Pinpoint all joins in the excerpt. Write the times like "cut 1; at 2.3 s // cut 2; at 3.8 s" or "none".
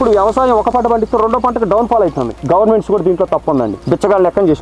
cut 1; at 2.4 s // cut 2; at 3.8 s